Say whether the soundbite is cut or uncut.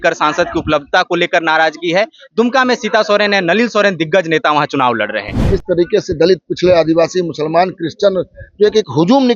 cut